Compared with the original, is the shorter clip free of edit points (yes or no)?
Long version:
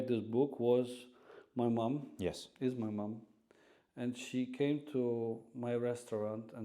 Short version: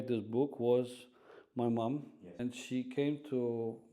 no